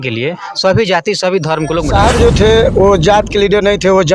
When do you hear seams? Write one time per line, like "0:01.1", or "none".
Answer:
0:01.9

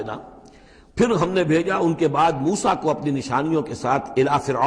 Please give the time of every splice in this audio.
none

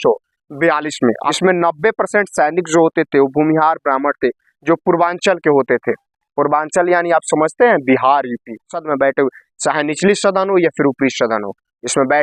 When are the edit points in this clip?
0:01.3
0:08.8

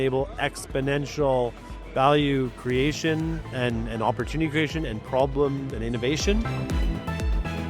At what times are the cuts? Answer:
0:06.5

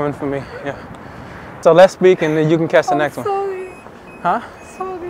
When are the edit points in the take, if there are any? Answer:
0:01.5

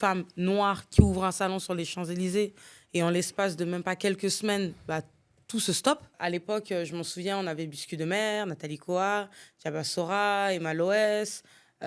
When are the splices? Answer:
0:06.1

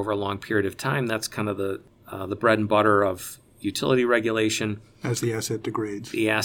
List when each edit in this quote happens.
0:01.9

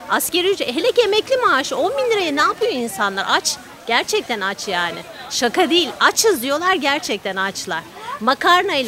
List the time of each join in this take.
none

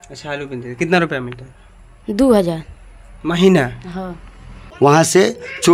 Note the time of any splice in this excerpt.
0:04.8

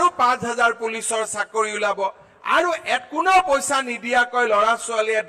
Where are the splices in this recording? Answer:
none

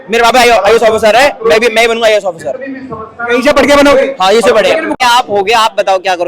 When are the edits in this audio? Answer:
0:04.9

